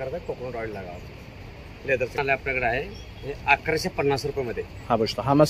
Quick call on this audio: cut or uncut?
cut